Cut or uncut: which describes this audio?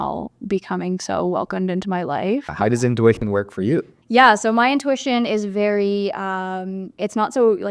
cut